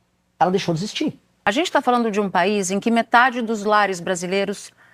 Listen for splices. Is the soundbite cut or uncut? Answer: cut